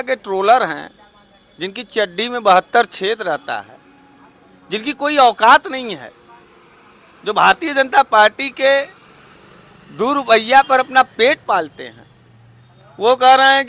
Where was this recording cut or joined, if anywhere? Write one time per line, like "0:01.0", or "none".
none